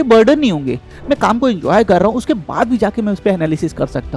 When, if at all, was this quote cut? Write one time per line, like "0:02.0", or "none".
none